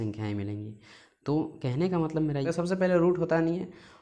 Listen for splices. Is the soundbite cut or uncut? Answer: cut